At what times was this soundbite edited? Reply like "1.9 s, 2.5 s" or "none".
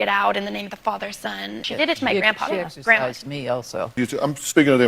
1.6 s, 4.0 s